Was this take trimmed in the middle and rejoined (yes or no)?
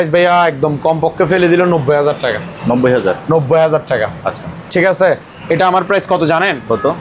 no